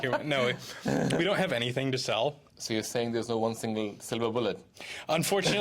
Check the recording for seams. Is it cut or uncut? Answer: cut